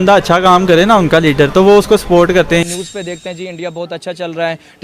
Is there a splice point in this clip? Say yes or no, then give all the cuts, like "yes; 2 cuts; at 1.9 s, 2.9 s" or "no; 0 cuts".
yes; 1 cut; at 2.6 s